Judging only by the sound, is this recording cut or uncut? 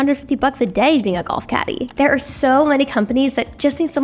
cut